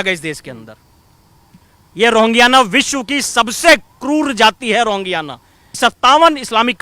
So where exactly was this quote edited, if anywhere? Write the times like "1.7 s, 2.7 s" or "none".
5.8 s